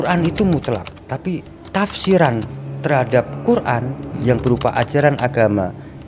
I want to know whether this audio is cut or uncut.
uncut